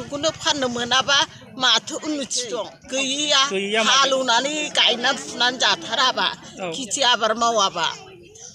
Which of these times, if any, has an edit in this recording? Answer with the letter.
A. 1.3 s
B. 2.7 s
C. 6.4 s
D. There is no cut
B